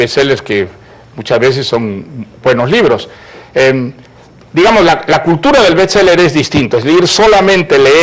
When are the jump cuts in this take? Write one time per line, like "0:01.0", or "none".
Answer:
0:06.7